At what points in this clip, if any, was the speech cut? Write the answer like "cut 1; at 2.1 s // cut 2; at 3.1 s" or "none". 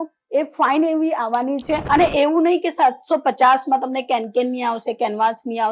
cut 1; at 1.8 s